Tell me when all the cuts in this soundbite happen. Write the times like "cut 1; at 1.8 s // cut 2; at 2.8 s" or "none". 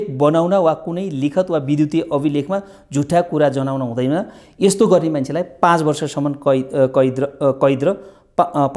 none